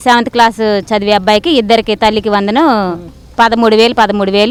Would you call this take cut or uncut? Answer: uncut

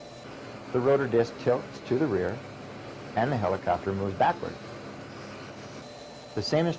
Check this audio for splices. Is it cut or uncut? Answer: uncut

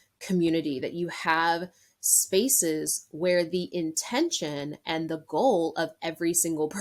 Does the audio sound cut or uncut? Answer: uncut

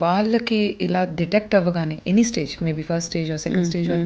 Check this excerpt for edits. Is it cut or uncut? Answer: uncut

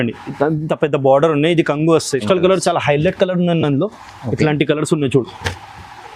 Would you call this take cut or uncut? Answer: cut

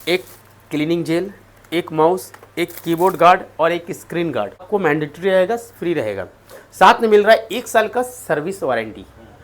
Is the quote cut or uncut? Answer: cut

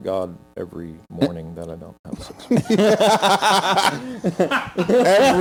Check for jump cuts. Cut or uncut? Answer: uncut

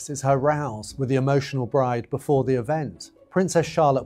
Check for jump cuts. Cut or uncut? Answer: uncut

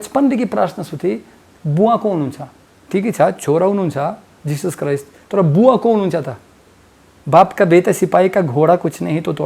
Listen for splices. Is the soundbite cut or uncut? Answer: uncut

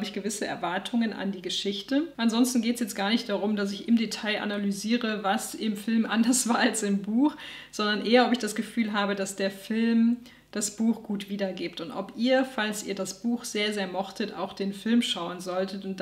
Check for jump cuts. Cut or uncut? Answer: cut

